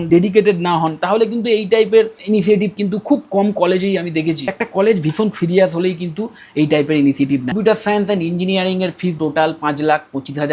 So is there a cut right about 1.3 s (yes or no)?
no